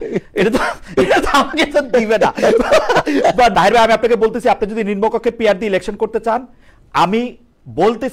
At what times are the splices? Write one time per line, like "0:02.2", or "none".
0:03.5